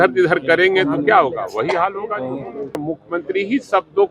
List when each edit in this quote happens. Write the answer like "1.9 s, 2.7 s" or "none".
2.8 s